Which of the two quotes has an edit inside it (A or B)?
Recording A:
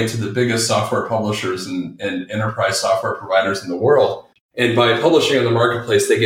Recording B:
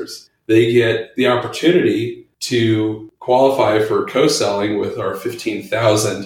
A